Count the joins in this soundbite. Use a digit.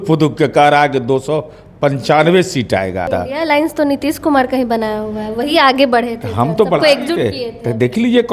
1